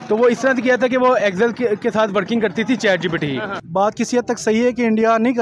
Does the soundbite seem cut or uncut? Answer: cut